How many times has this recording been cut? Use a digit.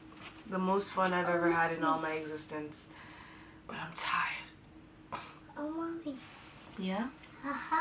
0